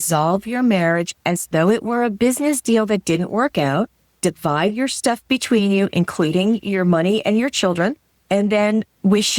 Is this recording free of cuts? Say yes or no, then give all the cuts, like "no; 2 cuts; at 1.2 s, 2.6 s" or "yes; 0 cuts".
no; 2 cuts; at 4.0 s, 8.1 s